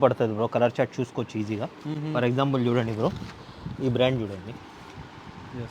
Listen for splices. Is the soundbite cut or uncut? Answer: uncut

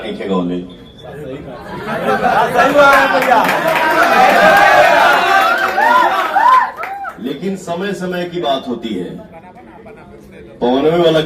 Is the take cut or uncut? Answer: uncut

